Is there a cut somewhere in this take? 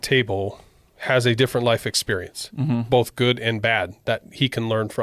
yes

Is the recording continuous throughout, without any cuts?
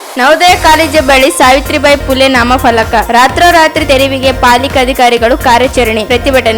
yes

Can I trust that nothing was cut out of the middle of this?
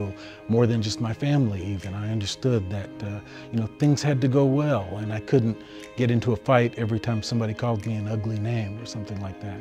yes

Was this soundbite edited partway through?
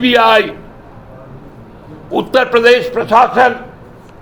no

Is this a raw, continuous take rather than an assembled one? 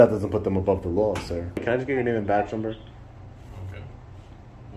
no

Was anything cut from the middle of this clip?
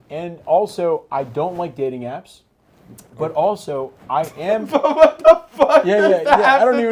no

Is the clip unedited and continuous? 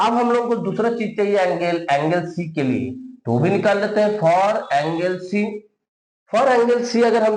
yes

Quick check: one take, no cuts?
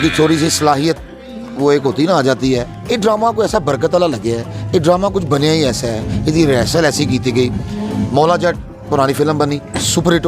no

